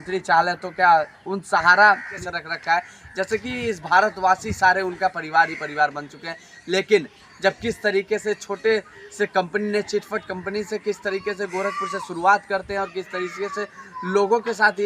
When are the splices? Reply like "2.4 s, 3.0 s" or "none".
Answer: 2.1 s